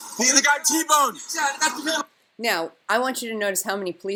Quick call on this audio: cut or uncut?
uncut